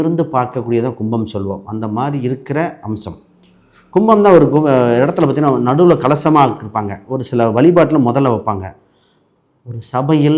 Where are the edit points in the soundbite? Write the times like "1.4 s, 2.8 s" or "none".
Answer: none